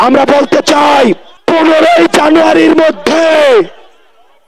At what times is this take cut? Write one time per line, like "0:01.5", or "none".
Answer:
0:01.3